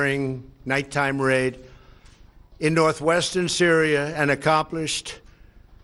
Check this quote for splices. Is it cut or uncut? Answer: uncut